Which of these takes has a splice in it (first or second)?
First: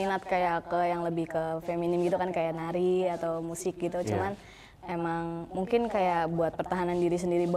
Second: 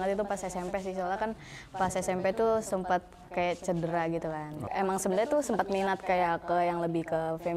second